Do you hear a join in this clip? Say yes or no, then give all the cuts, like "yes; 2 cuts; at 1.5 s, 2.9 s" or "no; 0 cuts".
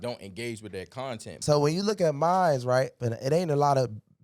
yes; 2 cuts; at 1.3 s, 3.0 s